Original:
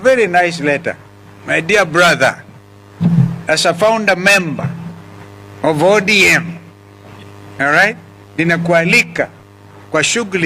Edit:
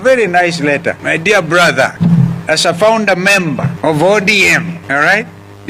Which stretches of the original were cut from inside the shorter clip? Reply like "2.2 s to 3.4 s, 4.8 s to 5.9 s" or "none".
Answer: 1.0 s to 1.4 s, 2.4 s to 2.9 s, 4.7 s to 5.5 s, 6.6 s to 7.5 s